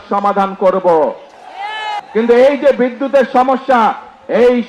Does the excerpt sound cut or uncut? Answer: cut